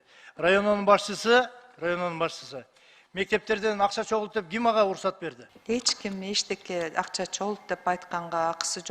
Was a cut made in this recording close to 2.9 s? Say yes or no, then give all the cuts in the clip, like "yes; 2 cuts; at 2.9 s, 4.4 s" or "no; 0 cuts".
no; 1 cut; at 5.5 s